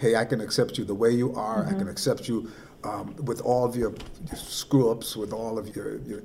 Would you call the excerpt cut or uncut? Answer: uncut